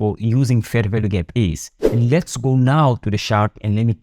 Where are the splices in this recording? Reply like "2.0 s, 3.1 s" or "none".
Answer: 1.8 s